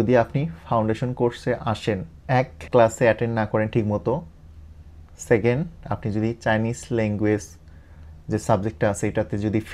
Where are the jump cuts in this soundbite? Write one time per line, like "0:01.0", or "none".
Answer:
none